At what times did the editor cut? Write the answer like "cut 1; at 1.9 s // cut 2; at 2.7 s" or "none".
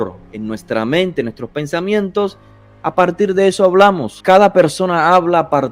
cut 1; at 4.1 s